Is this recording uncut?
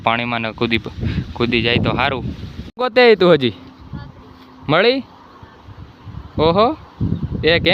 no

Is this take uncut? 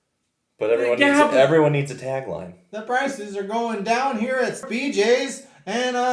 no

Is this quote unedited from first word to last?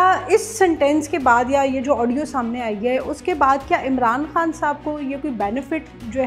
yes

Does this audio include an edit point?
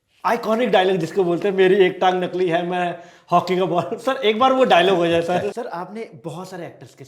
yes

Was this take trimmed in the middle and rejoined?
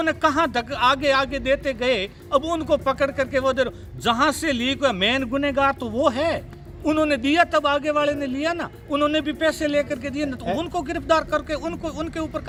no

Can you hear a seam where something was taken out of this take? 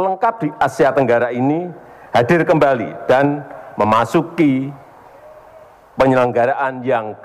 no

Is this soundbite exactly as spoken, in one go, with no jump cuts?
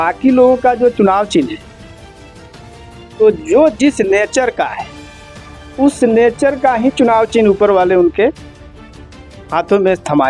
no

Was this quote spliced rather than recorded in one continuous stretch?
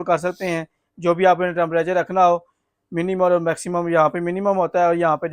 no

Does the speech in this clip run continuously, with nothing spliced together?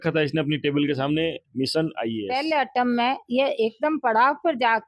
no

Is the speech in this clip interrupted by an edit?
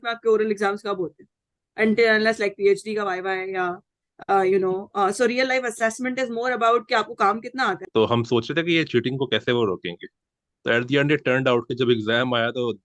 yes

